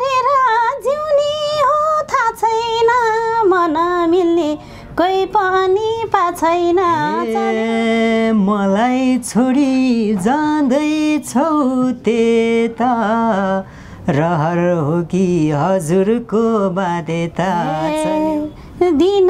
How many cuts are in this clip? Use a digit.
2